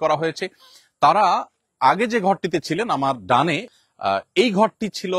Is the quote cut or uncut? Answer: cut